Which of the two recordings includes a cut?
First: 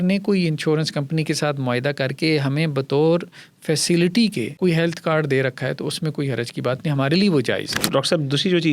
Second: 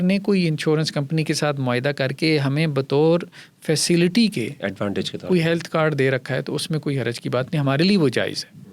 first; 2 cuts; at 4.5 s, 7.8 s

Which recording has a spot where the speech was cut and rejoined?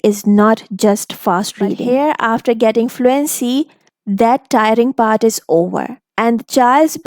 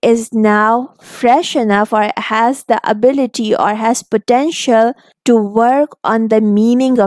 first; 1 cut; at 1.8 s

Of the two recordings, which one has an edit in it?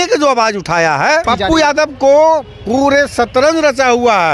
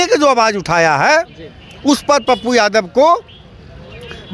first; 1 cut; at 1.2 s

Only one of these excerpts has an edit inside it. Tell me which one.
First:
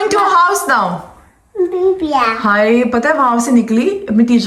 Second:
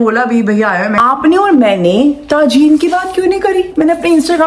second; 1 cut; at 1.0 s

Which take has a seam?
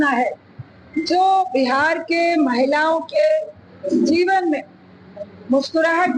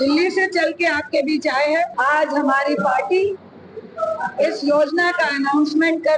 second; 1 cut; at 1.9 s

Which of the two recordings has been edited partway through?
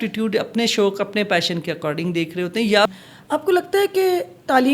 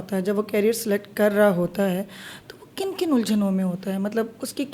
first; 1 cut; at 2.9 s

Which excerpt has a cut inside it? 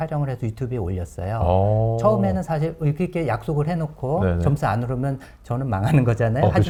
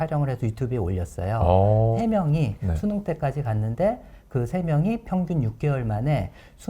second; 1 cut; at 2.0 s

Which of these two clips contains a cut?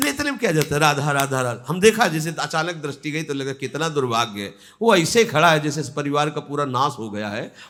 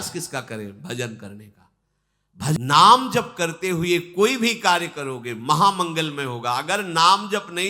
second; 1 cut; at 2.6 s

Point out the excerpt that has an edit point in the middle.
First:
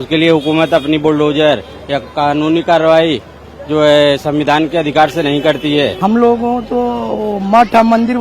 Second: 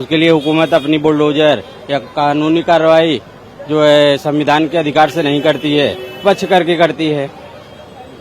first; 1 cut; at 5.9 s

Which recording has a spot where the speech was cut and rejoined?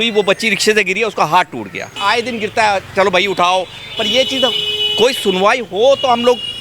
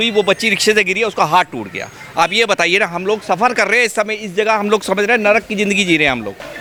first; 1 cut; at 2.0 s

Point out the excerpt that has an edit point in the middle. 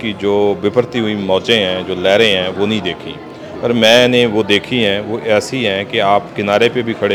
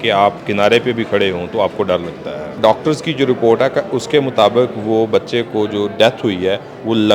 second; 1 cut; at 2.6 s

